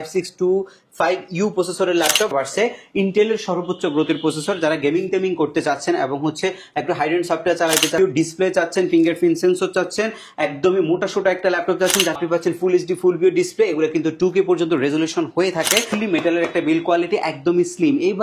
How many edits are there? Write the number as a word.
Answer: four